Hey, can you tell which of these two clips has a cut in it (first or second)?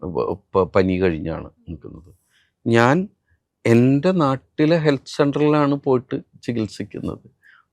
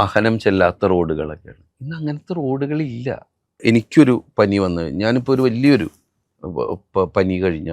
second